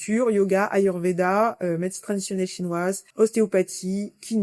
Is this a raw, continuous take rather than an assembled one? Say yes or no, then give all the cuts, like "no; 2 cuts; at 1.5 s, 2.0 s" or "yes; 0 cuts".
no; 1 cut; at 3.1 s